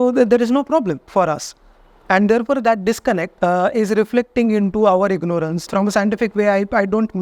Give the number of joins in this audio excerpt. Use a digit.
3